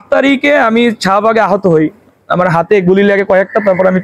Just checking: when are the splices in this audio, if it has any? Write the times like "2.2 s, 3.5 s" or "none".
none